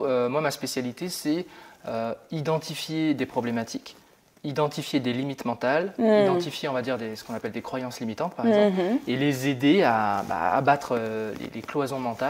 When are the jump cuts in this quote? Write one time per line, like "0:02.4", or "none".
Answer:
none